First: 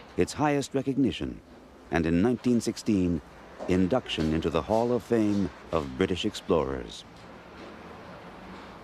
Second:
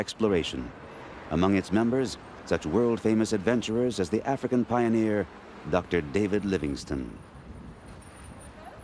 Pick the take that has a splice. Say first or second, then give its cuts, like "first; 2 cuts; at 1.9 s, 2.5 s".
first; 1 cut; at 4.1 s